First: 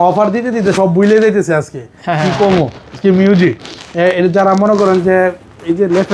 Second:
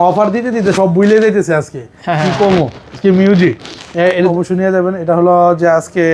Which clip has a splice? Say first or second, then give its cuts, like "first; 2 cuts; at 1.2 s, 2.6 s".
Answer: second; 1 cut; at 4.3 s